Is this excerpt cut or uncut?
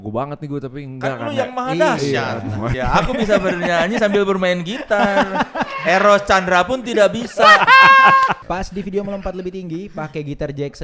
cut